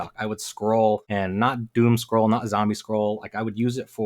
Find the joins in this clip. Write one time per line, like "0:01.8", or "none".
0:01.1